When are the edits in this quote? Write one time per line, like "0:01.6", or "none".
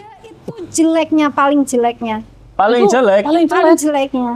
none